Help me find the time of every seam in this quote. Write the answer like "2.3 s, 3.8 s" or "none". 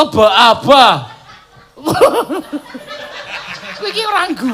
2.5 s

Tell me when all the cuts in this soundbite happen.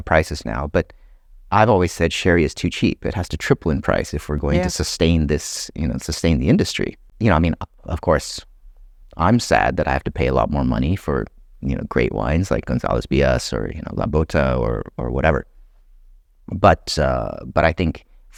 none

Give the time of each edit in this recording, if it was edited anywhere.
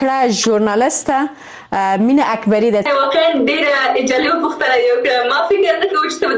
2.9 s

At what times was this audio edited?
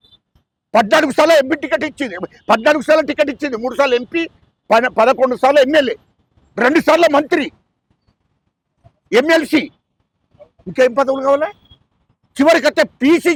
none

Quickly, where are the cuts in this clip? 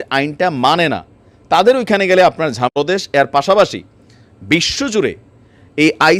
2.8 s

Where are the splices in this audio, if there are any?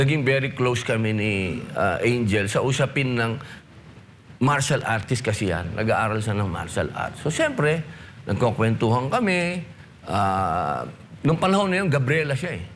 none

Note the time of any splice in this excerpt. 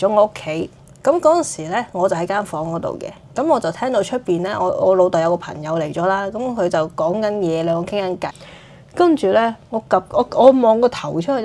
8.3 s

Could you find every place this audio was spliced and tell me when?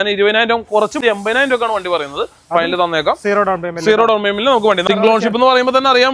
1.0 s, 4.8 s

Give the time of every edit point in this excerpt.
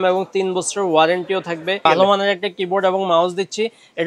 1.9 s

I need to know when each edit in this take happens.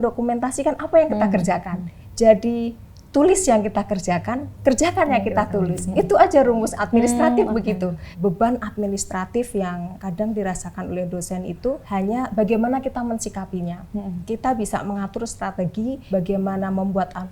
4.4 s, 8.1 s, 10.0 s, 11.8 s, 16.0 s

